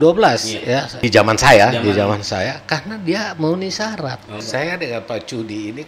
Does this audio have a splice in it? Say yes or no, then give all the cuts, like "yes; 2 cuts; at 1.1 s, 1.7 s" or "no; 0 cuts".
yes; 2 cuts; at 0.9 s, 4.4 s